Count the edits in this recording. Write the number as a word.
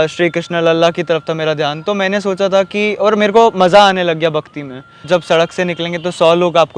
one